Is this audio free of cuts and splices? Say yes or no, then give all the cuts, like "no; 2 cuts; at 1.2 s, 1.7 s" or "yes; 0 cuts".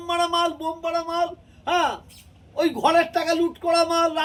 yes; 0 cuts